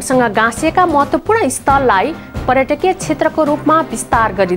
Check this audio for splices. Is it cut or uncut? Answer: uncut